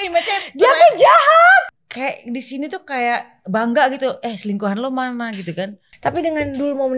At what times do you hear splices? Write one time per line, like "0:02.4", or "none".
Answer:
0:01.7
0:05.8